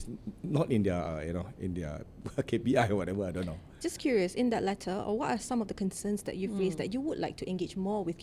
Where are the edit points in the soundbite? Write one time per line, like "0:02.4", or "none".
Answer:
none